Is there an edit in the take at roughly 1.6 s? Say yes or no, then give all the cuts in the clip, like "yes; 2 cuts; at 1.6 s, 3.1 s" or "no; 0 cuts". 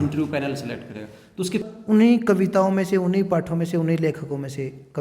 yes; 1 cut; at 1.6 s